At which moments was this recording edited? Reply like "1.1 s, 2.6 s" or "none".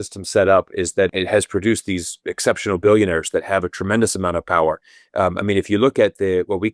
1.1 s